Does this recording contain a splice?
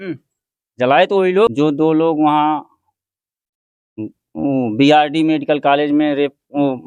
yes; 1 cut; at 1.5 s

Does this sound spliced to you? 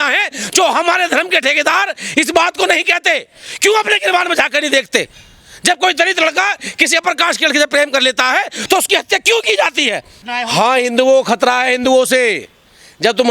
yes; 1 cut; at 10.2 s

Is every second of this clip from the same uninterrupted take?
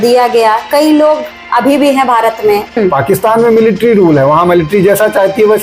no; 1 cut; at 2.8 s

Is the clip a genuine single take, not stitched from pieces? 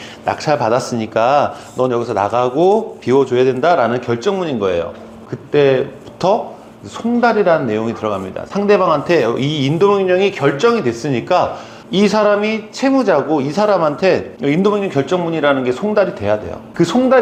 yes; 0 cuts

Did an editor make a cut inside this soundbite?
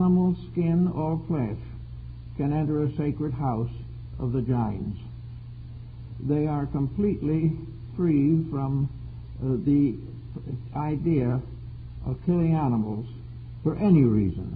no; 0 cuts

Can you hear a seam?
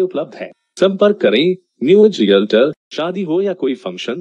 yes; 1 cut; at 2.9 s

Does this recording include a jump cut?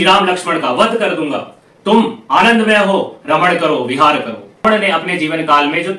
yes; 1 cut; at 4.6 s

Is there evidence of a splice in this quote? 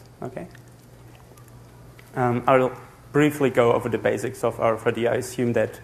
no; 0 cuts

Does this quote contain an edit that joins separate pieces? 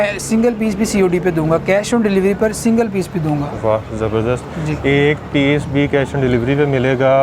no; 0 cuts

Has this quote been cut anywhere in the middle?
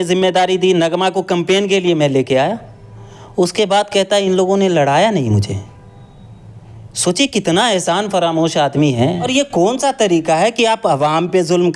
yes; 1 cut; at 9.3 s

